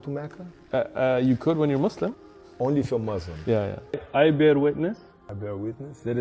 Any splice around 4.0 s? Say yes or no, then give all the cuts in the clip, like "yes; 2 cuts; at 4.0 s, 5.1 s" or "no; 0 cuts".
yes; 1 cut; at 4.0 s